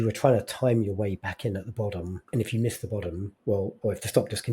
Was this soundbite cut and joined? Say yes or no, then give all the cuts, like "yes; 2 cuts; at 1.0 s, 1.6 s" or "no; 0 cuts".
yes; 2 cuts; at 2.2 s, 3.3 s